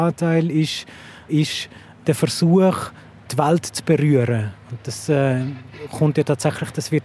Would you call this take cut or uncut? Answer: uncut